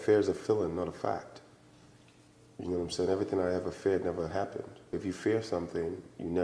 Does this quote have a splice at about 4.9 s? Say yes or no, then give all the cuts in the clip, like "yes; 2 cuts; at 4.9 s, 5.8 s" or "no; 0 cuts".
yes; 1 cut; at 4.9 s